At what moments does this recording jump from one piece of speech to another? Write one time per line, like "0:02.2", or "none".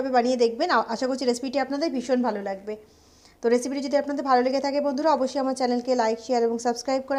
none